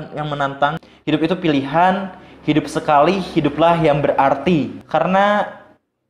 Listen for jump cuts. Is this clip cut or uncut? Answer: cut